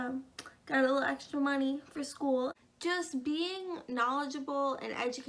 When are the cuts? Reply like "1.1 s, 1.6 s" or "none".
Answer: 2.6 s